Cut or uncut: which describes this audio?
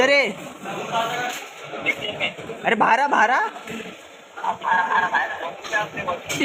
uncut